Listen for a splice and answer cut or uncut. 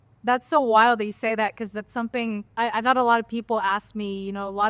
uncut